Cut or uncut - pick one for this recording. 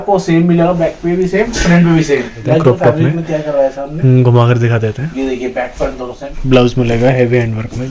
cut